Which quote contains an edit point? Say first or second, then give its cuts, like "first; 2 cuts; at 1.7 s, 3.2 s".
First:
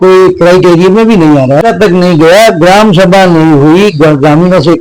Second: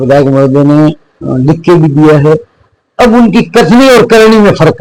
first; 1 cut; at 1.6 s